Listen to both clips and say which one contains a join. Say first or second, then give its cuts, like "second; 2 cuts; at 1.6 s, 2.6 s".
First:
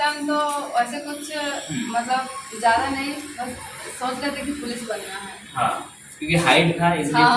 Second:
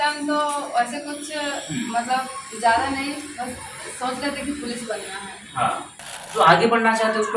second; 1 cut; at 6.1 s